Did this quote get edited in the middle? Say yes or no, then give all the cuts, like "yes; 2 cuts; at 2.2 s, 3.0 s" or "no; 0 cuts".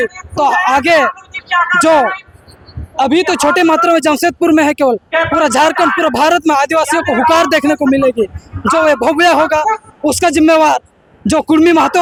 no; 0 cuts